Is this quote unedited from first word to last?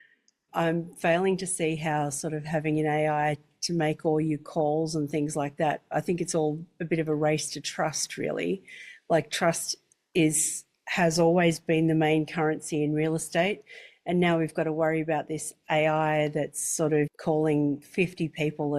no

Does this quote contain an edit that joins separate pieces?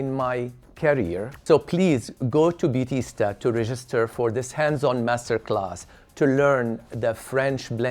yes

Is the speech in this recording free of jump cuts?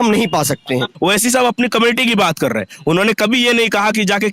no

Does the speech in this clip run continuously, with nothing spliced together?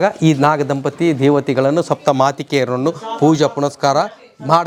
yes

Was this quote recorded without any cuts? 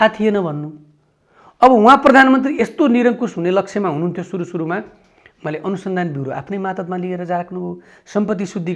yes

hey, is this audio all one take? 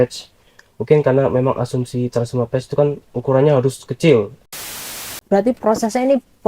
no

